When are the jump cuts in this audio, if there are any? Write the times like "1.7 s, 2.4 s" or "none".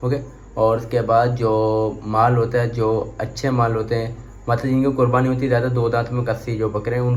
none